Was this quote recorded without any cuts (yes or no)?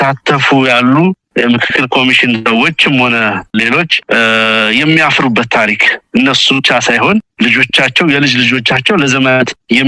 yes